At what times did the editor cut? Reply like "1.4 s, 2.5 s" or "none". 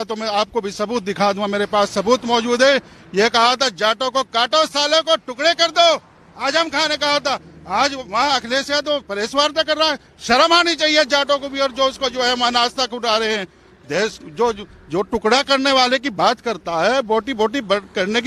none